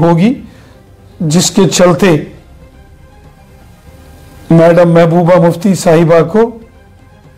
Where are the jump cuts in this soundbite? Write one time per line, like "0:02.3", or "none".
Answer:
none